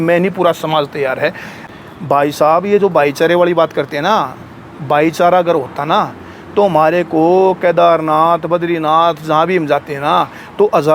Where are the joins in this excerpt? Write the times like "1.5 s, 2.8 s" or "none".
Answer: 1.5 s